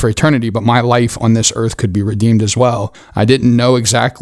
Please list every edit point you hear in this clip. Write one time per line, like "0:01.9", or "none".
0:03.0